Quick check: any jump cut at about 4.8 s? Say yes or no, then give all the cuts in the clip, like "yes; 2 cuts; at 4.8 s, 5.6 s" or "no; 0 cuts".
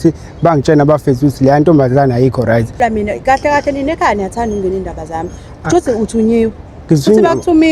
no; 1 cut; at 2.8 s